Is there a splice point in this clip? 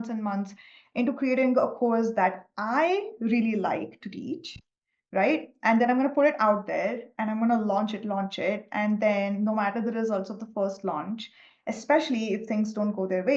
no; 0 cuts

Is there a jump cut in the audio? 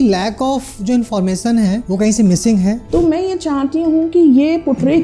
yes; 2 cuts; at 1.8 s, 2.8 s

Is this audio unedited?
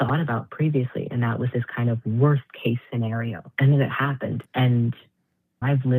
no; 2 cuts; at 3.4 s, 4.4 s

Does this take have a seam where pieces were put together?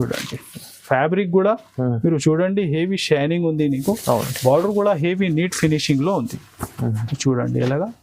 no; 0 cuts

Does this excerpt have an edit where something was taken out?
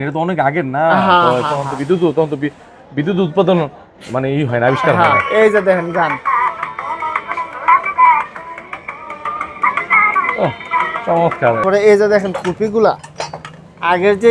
yes; 1 cut; at 11.6 s

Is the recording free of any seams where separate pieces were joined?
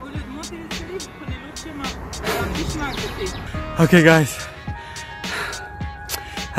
no; 1 cut; at 3.5 s

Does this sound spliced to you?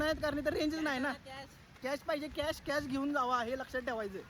no; 0 cuts

